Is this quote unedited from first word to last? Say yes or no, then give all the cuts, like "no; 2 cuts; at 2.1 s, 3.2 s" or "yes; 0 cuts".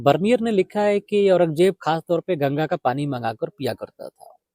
yes; 0 cuts